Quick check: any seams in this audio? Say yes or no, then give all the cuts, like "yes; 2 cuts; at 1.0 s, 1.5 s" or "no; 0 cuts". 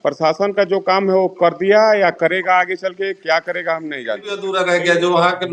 yes; 1 cut; at 4.4 s